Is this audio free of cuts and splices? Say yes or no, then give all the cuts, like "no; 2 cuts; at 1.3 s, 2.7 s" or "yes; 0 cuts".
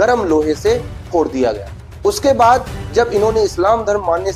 yes; 0 cuts